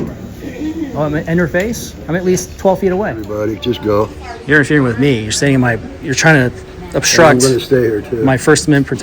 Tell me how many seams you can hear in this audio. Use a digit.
1